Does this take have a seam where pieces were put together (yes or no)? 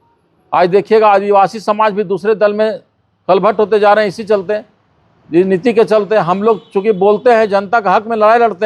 no